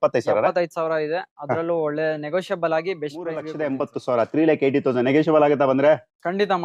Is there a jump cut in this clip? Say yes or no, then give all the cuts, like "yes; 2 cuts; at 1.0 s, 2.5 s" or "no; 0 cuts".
yes; 1 cut; at 3.5 s